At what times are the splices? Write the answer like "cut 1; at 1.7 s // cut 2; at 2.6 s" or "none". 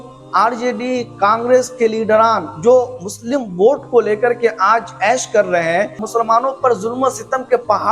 cut 1; at 6.0 s

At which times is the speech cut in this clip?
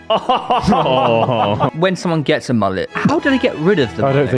cut 1; at 1.7 s // cut 2; at 2.9 s

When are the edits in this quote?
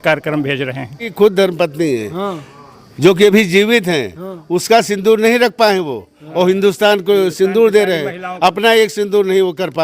cut 1; at 1.1 s

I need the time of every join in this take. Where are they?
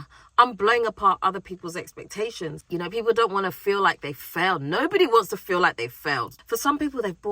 cut 1; at 2.6 s // cut 2; at 6.3 s

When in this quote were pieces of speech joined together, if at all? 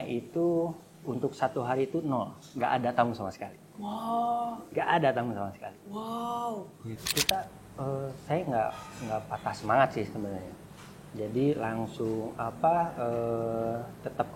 cut 1; at 7.1 s

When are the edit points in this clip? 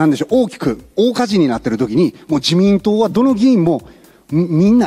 none

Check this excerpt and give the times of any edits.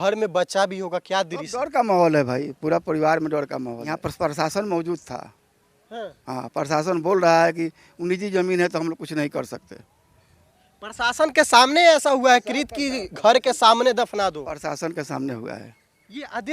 cut 1; at 4.0 s

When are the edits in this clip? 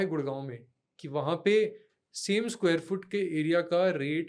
none

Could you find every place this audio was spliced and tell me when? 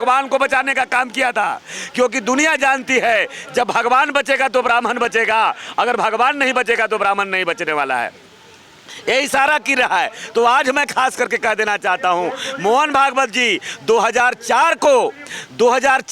none

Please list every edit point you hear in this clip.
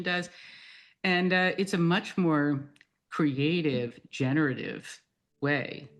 none

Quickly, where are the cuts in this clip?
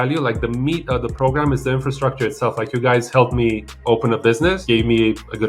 cut 1; at 4.6 s

